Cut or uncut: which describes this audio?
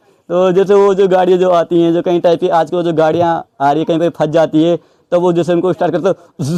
uncut